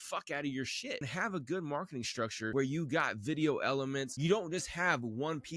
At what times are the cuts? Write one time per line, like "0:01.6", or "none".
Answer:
0:01.1
0:02.5
0:04.1